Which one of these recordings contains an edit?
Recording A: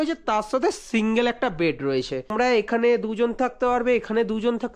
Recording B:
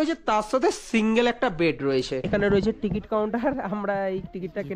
B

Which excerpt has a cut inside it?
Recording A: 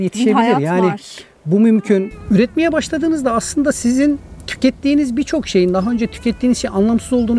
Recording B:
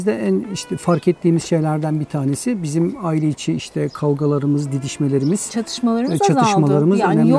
A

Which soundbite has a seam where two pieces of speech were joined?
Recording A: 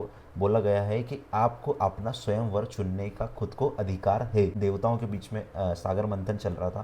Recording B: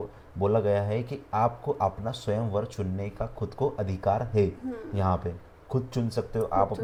A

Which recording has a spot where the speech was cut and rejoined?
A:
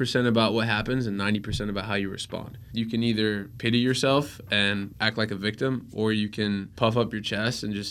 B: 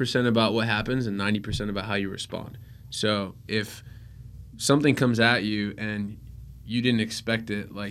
A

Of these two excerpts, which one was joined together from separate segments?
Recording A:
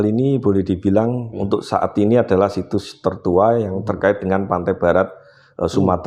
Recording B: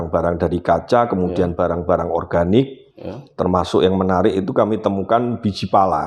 A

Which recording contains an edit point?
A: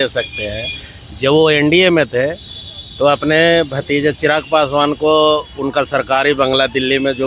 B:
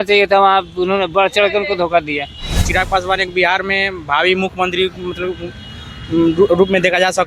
B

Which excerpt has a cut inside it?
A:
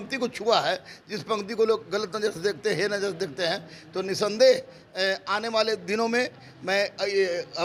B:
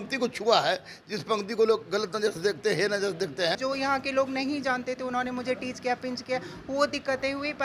B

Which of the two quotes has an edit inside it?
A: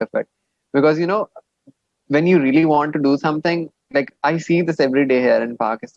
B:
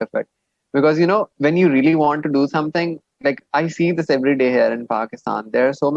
B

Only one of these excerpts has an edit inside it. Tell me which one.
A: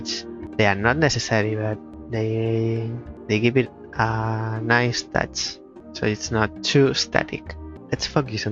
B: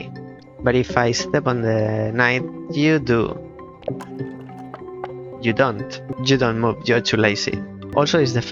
B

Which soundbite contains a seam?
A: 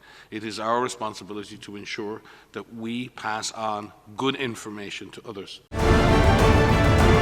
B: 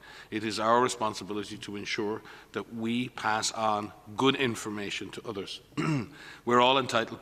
A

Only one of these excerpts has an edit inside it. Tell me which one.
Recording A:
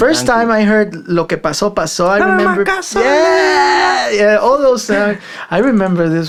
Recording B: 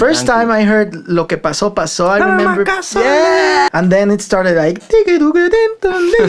B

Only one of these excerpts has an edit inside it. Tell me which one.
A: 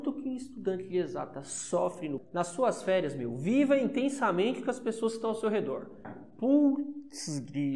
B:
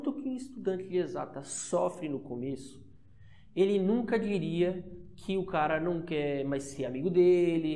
A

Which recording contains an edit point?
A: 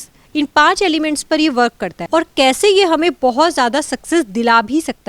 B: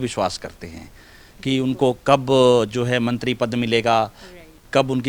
A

